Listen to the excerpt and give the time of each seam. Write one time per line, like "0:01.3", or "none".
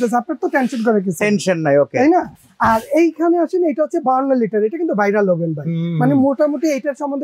none